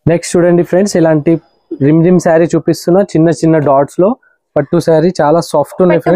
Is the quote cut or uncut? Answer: uncut